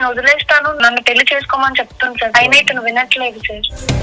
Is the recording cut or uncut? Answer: cut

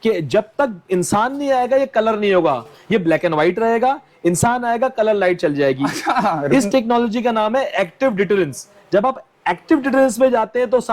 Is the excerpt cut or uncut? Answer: uncut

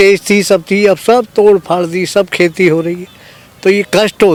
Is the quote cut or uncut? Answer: uncut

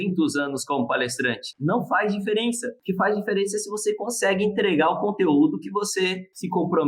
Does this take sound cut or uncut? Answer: cut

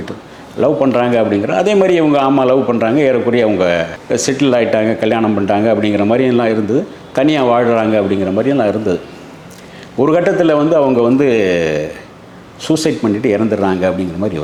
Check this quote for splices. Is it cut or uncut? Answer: uncut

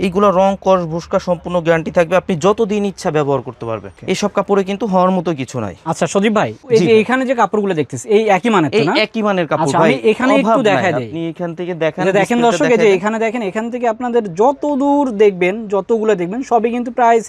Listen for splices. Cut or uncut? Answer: uncut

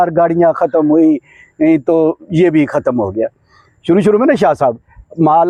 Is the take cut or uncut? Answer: uncut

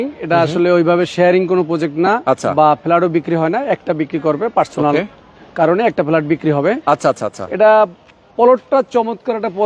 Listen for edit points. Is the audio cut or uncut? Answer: uncut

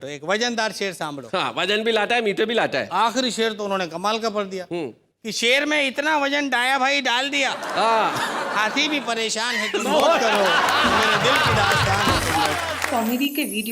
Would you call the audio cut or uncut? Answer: cut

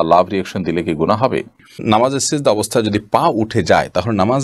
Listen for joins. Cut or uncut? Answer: cut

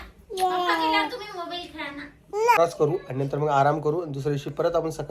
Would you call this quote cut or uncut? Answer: cut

